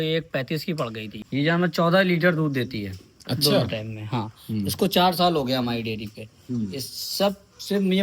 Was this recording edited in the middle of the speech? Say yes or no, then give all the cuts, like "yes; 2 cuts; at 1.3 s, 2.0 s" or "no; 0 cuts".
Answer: yes; 1 cut; at 1.2 s